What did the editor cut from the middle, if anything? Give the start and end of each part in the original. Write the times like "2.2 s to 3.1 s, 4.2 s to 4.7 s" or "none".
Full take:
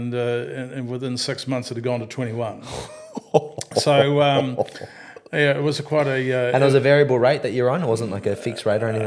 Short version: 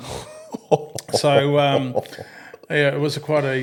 none